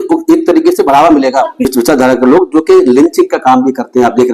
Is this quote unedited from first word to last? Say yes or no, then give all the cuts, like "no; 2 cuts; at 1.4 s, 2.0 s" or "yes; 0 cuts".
no; 1 cut; at 1.6 s